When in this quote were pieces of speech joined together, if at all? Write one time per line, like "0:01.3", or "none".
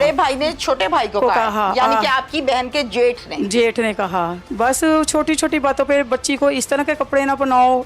0:04.4